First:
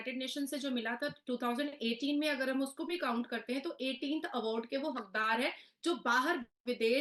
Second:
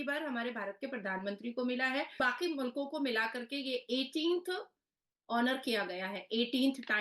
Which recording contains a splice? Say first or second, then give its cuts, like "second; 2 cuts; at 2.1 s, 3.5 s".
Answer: second; 1 cut; at 2.2 s